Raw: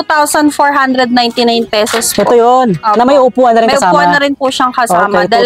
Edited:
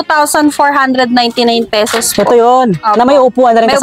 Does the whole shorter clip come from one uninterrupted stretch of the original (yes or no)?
yes